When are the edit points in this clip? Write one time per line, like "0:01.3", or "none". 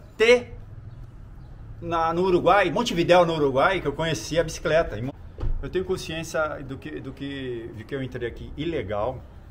0:05.4

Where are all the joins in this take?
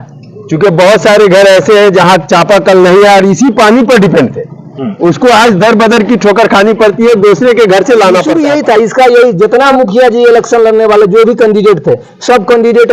0:08.3

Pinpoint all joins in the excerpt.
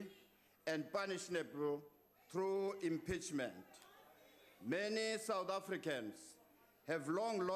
0:06.1

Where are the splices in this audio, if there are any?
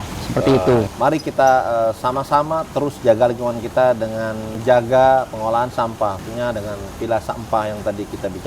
0:00.9
0:04.5
0:06.2

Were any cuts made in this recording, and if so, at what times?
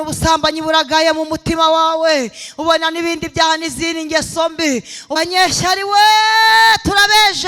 0:05.2

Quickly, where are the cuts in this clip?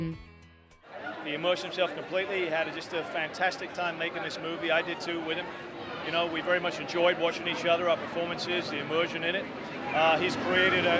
none

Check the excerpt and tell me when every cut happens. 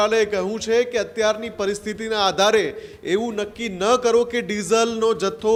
none

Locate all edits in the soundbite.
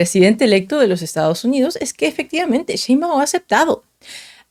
none

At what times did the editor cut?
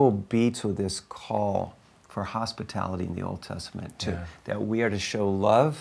none

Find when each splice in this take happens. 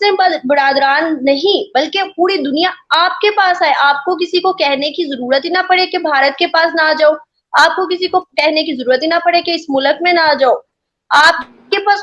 none

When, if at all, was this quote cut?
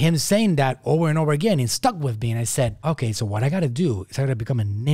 none

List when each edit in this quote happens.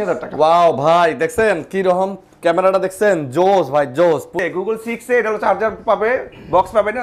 0:04.3

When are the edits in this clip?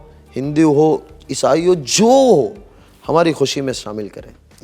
none

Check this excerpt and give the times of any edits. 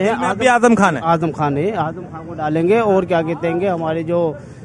none

